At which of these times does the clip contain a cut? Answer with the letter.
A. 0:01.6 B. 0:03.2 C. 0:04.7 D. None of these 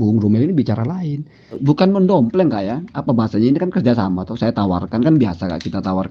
A